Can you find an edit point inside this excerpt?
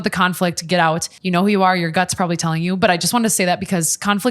yes; 1 cut; at 1.1 s

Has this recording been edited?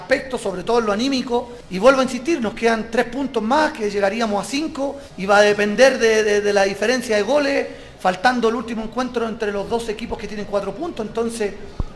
no; 0 cuts

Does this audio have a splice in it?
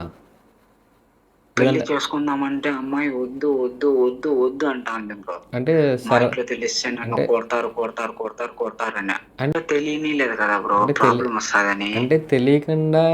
yes; 1 cut; at 9.4 s

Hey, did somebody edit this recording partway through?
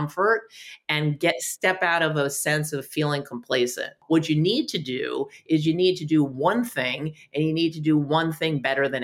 yes; 1 cut; at 3.9 s

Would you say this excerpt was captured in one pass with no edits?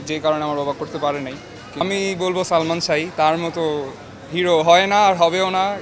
no; 1 cut; at 1.8 s

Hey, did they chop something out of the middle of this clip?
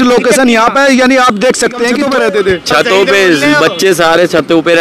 yes; 1 cut; at 2.0 s

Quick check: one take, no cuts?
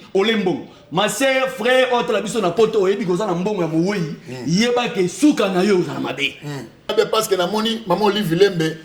no; 1 cut; at 6.9 s

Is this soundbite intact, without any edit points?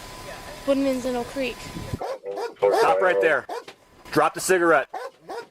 no; 1 cut; at 1.9 s

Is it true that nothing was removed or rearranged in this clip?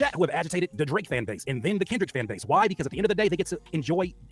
no; 1 cut; at 2.6 s

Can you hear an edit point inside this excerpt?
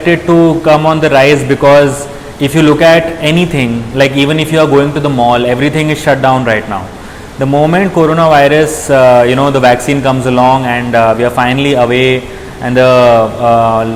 no; 0 cuts

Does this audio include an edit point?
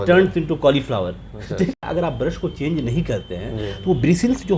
yes; 1 cut; at 1.7 s

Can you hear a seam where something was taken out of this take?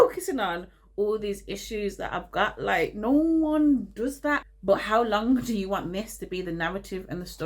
yes; 1 cut; at 4.4 s

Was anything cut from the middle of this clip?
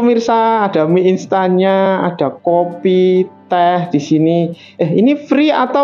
no; 0 cuts

